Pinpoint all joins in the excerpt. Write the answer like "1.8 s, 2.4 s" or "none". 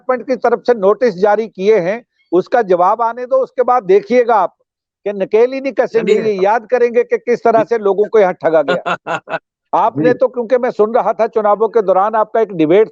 9.6 s